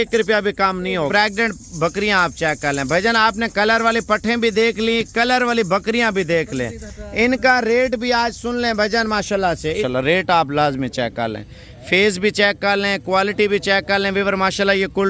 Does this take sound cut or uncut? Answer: cut